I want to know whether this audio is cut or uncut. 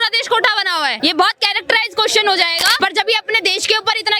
cut